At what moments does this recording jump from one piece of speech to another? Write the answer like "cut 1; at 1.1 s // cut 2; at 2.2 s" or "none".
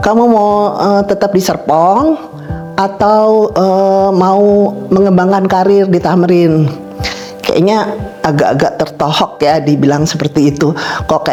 none